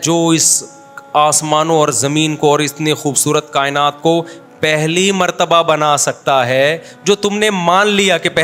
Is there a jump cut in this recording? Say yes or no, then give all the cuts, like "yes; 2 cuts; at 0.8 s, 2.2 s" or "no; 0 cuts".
no; 0 cuts